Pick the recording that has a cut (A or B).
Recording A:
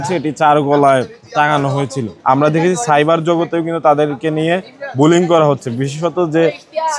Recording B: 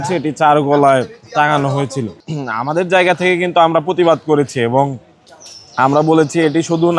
A